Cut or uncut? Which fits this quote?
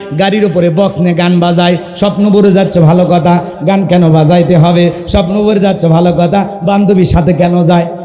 uncut